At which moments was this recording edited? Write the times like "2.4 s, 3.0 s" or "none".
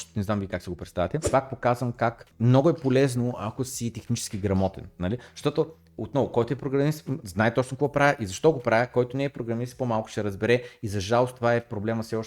1.2 s